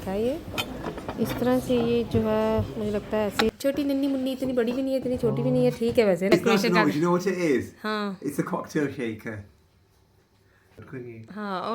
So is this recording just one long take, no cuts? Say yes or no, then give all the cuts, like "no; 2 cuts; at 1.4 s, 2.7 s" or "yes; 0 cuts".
no; 3 cuts; at 3.5 s, 6.3 s, 10.8 s